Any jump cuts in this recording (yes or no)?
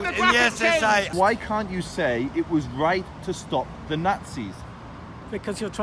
yes